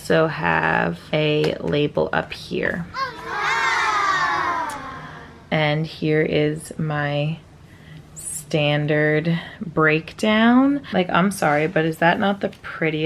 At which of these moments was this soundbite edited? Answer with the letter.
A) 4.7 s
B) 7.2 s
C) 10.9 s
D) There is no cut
C